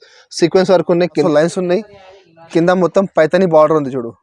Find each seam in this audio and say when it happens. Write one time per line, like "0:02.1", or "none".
0:01.2